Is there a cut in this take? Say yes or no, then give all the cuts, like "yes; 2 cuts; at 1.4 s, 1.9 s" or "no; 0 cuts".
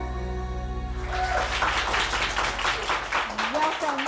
yes; 1 cut; at 1.3 s